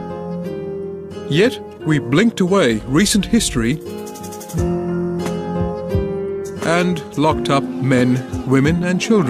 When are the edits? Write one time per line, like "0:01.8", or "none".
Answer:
0:06.5